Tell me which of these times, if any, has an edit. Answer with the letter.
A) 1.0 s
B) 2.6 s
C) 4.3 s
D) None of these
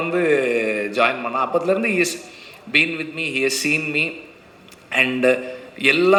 D